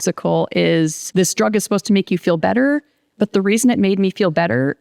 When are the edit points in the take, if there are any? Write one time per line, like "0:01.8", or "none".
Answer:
0:01.0